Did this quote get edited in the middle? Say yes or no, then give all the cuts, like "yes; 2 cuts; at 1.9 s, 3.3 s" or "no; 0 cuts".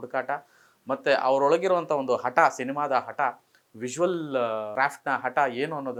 no; 0 cuts